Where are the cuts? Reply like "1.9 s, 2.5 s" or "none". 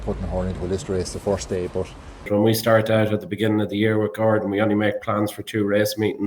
2.2 s

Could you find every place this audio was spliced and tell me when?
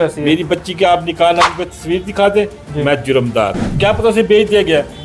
3.6 s

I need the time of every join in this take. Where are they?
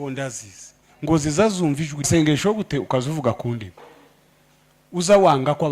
2.1 s

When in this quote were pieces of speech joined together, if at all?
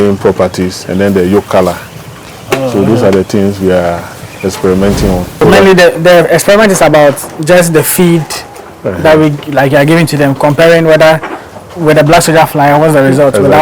5.4 s

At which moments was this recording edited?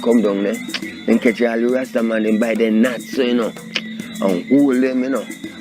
none

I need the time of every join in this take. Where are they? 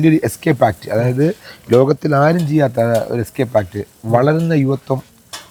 none

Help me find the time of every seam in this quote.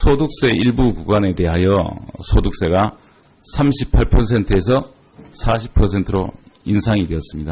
4.1 s

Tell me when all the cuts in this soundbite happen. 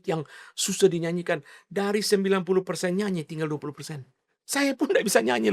none

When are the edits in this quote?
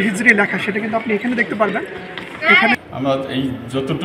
2.7 s

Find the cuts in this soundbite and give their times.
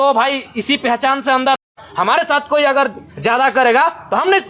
1.6 s

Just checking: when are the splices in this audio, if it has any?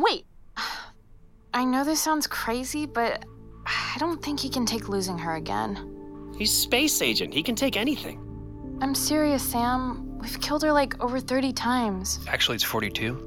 none

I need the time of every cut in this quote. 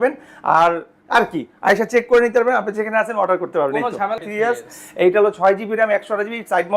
4.2 s

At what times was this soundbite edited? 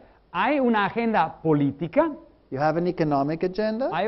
3.2 s

